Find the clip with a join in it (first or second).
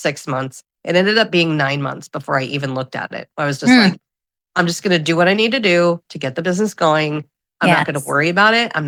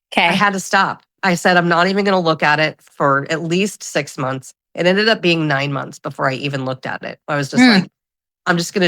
second